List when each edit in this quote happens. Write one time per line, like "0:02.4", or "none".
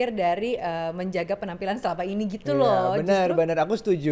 none

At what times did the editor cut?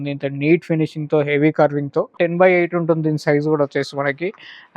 0:02.1

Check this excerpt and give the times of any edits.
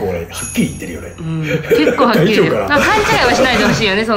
none

